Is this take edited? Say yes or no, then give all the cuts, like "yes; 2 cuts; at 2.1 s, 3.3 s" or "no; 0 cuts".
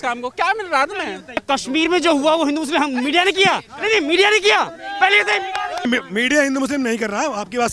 yes; 2 cuts; at 1.4 s, 5.8 s